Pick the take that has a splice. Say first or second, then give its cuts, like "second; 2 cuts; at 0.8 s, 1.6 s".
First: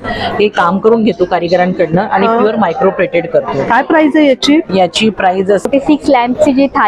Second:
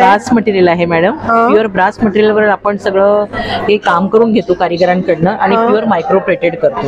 first; 1 cut; at 5.7 s